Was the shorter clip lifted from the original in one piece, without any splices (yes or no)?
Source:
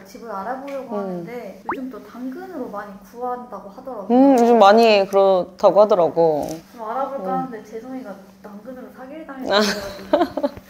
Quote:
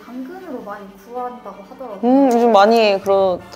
yes